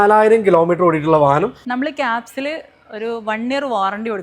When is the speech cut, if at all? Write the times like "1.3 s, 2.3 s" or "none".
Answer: 1.6 s